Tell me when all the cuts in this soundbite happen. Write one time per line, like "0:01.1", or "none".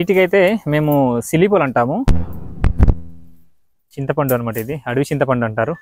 none